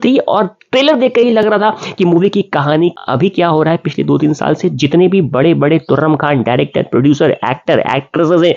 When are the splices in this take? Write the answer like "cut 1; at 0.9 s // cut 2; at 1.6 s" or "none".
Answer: cut 1; at 3.0 s